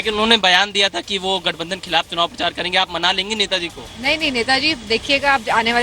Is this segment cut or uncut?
uncut